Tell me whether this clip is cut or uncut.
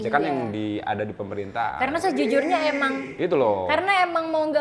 uncut